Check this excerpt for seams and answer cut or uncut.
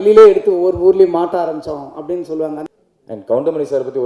cut